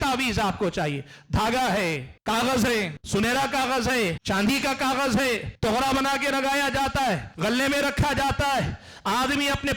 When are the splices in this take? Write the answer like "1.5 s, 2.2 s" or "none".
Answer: 2.1 s, 3.0 s, 4.2 s, 5.5 s, 7.3 s